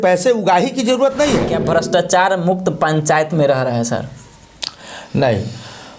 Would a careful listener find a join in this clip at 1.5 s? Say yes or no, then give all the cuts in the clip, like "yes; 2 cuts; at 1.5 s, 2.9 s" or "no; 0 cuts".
yes; 1 cut; at 1.5 s